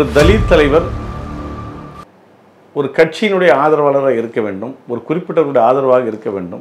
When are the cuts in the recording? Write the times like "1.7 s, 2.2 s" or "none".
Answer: none